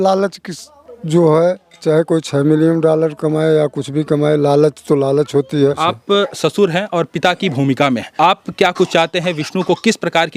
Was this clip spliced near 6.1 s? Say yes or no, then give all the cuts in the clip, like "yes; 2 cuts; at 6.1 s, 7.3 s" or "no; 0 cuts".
yes; 2 cuts; at 6.1 s, 8.1 s